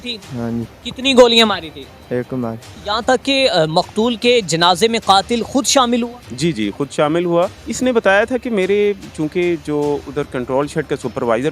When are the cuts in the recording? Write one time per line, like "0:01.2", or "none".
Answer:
0:02.7
0:07.6